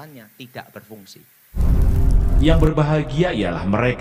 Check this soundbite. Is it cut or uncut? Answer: cut